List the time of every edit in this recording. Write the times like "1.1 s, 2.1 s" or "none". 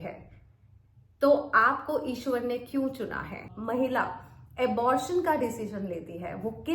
3.5 s